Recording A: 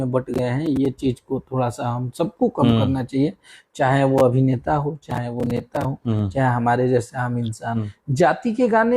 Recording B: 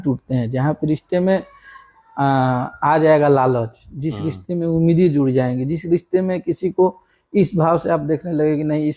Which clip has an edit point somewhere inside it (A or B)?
A